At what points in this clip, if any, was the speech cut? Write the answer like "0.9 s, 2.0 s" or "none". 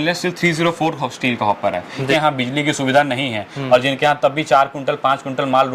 2.1 s